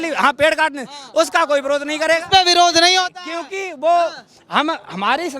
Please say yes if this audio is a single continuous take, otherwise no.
yes